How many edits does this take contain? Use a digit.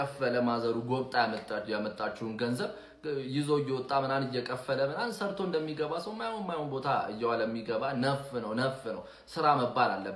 0